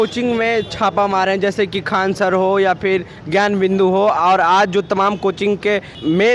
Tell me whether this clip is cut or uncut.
uncut